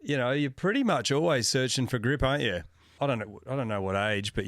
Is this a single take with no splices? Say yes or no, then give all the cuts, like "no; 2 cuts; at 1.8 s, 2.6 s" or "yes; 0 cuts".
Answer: no; 1 cut; at 2.9 s